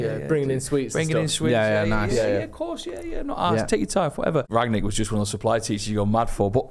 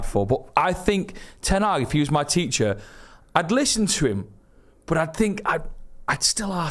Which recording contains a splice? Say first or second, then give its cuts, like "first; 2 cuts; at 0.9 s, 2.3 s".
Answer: first; 1 cut; at 4.5 s